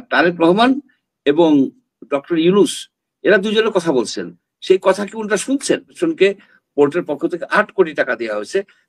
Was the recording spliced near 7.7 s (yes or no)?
no